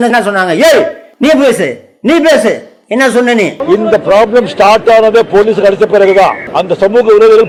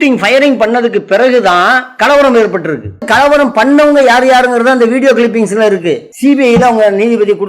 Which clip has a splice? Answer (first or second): second